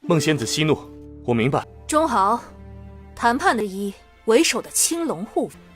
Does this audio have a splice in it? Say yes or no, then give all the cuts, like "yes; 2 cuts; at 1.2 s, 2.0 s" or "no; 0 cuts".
yes; 1 cut; at 3.6 s